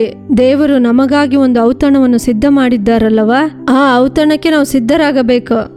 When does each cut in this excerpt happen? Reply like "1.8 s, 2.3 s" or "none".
none